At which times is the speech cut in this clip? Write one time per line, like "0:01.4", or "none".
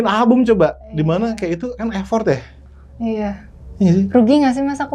none